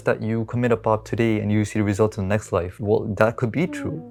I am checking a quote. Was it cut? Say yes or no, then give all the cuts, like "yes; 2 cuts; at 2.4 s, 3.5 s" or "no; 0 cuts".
no; 0 cuts